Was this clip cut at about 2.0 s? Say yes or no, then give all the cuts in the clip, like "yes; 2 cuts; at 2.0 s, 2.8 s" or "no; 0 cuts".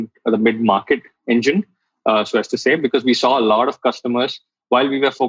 no; 0 cuts